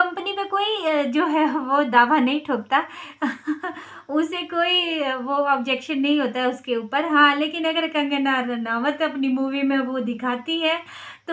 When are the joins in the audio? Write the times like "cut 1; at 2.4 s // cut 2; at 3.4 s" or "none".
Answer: none